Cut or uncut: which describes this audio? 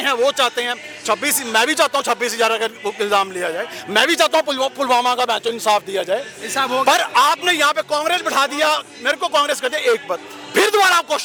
uncut